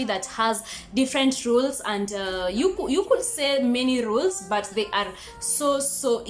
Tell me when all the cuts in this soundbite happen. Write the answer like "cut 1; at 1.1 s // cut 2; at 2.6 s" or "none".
none